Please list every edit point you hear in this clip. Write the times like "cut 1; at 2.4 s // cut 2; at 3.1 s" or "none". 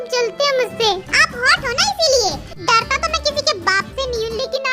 cut 1; at 2.5 s